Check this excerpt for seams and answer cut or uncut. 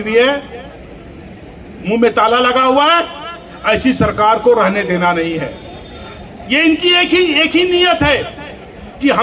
uncut